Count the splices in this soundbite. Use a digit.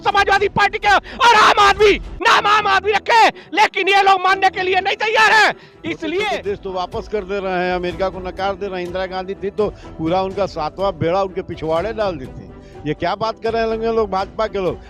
1